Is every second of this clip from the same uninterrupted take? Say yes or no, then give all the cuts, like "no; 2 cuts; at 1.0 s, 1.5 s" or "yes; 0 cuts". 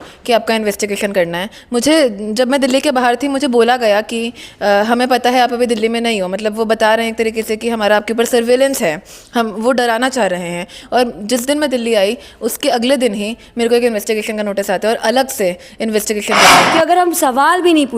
no; 1 cut; at 16.6 s